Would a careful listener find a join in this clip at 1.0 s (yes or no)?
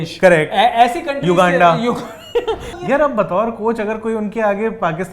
no